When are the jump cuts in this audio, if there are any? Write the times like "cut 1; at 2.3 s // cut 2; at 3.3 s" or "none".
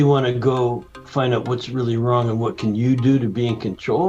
none